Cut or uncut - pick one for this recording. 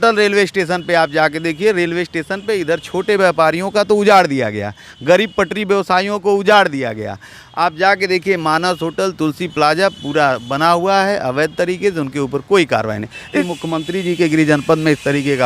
cut